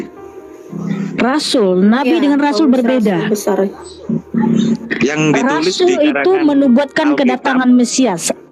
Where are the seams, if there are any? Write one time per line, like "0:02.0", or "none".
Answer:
none